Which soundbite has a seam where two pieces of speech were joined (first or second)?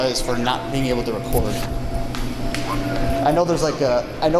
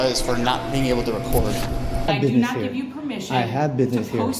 second